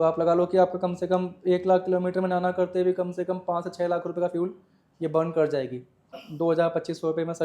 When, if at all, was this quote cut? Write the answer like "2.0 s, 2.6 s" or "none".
6.2 s